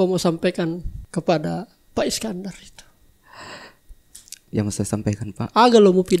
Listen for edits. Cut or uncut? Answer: cut